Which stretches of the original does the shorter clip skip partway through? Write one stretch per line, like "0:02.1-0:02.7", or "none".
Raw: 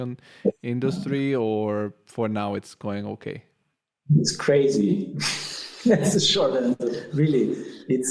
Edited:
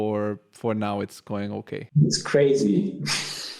0:03.4-0:04.0